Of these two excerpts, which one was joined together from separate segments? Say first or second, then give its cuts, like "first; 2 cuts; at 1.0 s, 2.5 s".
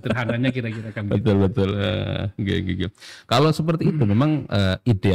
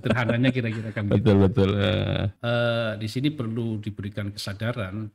second; 1 cut; at 2.3 s